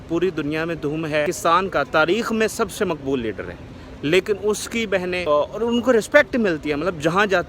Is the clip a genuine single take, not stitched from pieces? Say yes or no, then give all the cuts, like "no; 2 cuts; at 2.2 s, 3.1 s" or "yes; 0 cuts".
no; 2 cuts; at 1.2 s, 5.2 s